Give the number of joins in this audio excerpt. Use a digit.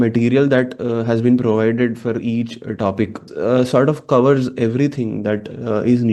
1